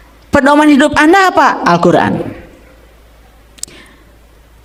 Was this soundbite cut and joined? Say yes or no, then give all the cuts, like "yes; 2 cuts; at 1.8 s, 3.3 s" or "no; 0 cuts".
no; 0 cuts